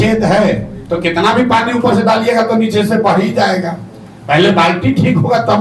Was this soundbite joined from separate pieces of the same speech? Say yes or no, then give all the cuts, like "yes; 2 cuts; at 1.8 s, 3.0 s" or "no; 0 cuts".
no; 0 cuts